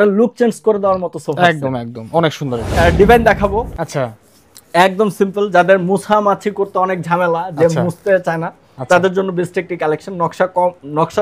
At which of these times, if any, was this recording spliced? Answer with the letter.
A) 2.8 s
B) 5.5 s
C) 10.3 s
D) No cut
A